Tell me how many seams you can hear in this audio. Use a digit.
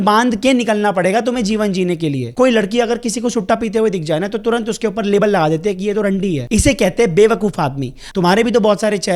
2